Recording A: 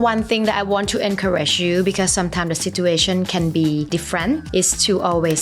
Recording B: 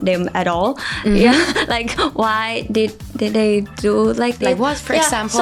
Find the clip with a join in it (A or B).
A